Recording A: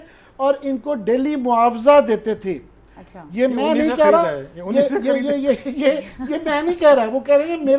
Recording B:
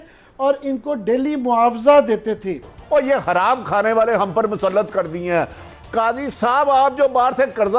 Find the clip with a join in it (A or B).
B